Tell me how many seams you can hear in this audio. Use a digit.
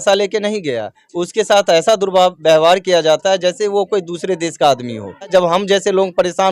1